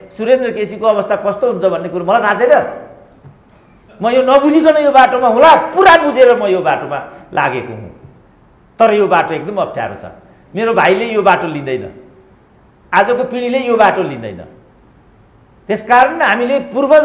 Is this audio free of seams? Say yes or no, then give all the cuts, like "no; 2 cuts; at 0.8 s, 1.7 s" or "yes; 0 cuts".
yes; 0 cuts